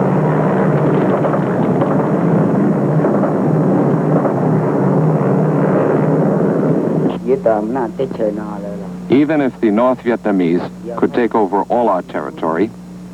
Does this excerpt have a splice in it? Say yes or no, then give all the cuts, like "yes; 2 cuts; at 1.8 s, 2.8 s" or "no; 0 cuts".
yes; 1 cut; at 7.1 s